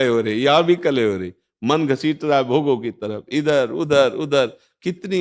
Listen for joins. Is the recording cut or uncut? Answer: cut